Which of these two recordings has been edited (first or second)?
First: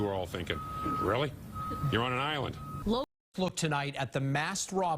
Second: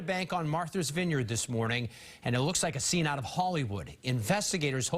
first